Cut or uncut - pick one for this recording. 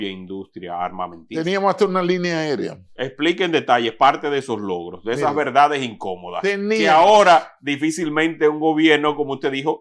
uncut